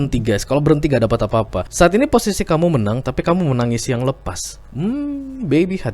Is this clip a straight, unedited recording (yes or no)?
no